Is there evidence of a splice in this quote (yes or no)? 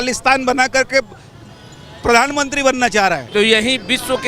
yes